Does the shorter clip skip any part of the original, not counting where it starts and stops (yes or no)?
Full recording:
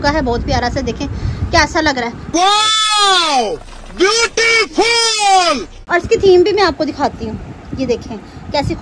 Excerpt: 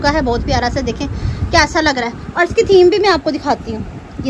yes